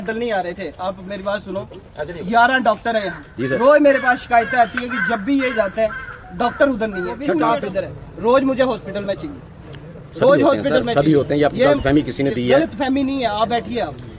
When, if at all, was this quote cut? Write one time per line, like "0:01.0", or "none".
0:07.5

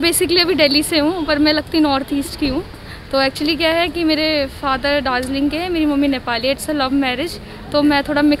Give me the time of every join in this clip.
none

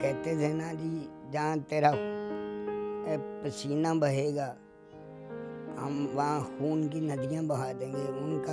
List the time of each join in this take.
0:02.0
0:03.1
0:04.5
0:05.8

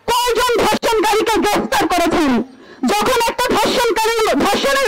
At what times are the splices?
none

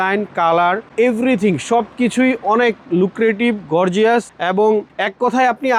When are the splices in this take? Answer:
none

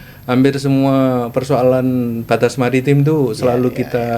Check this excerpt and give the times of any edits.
none

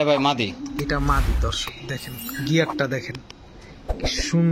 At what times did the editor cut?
none

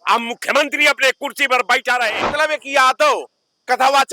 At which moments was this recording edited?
0:02.2

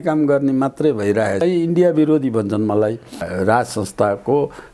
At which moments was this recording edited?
0:01.4
0:03.2

